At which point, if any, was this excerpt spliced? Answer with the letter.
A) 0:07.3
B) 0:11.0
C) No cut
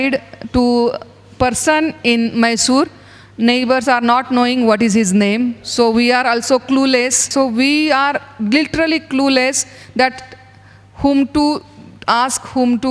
A